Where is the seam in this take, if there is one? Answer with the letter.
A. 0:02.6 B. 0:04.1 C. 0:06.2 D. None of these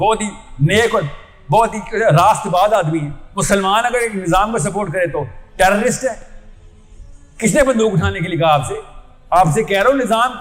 D